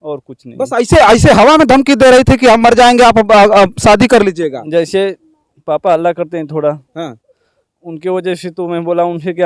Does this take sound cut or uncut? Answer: uncut